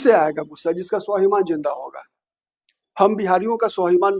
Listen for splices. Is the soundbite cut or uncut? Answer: uncut